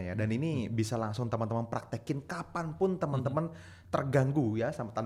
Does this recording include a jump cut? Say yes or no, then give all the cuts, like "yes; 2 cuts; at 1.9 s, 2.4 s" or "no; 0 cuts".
no; 0 cuts